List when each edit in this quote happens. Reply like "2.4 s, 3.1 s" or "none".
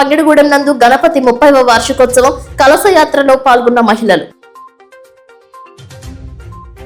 none